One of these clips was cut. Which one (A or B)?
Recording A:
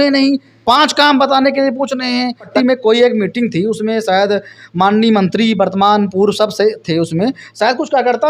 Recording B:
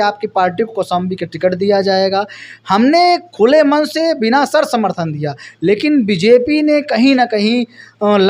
A